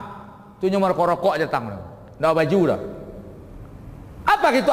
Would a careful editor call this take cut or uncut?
uncut